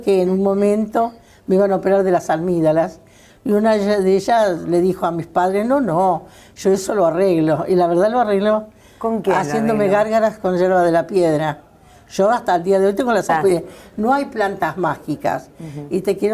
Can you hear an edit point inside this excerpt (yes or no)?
no